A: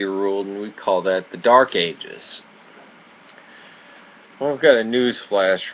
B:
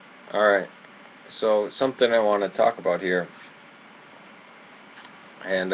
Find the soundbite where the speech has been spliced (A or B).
B